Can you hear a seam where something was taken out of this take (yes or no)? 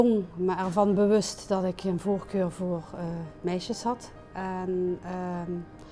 no